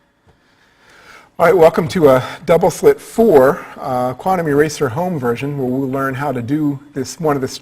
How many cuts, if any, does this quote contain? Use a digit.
1